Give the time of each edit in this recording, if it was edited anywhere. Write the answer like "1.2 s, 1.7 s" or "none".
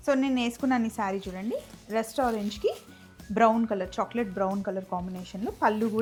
none